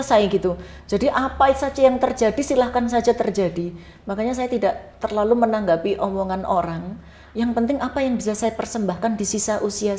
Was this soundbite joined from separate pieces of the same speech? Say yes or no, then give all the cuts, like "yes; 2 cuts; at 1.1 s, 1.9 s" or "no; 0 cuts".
no; 0 cuts